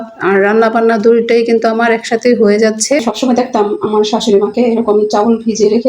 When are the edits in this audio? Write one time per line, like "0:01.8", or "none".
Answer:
0:03.0